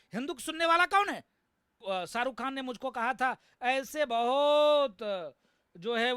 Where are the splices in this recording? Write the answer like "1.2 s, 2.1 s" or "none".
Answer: 1.8 s